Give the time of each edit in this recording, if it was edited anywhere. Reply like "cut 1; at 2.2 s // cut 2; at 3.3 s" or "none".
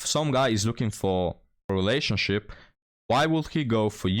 cut 1; at 1.7 s

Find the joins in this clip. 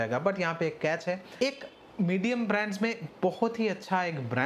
cut 1; at 1.4 s

